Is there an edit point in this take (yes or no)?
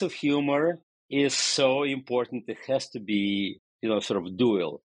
yes